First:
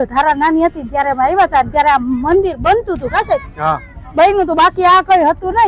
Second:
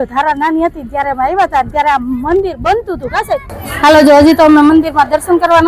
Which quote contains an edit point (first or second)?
second